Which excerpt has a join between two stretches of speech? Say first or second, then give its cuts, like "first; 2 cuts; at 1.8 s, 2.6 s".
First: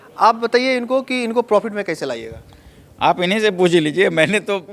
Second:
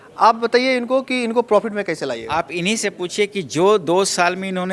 second; 1 cut; at 2.2 s